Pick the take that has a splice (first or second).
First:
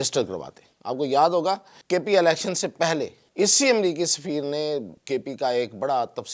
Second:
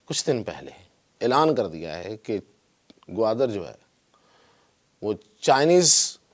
first